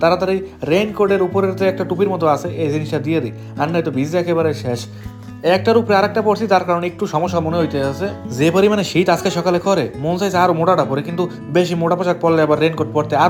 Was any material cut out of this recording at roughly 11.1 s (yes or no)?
no